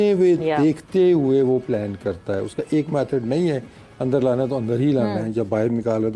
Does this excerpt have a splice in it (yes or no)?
no